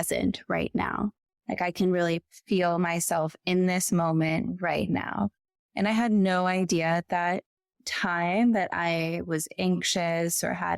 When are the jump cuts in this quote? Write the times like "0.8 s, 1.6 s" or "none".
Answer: 1.3 s